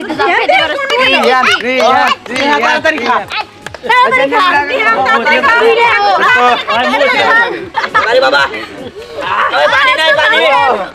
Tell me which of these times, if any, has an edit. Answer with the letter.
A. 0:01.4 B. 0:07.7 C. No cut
B